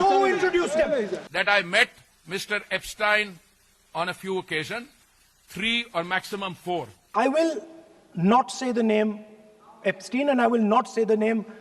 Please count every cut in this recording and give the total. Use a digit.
2